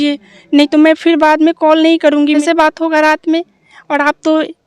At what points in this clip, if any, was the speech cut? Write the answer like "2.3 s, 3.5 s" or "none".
2.4 s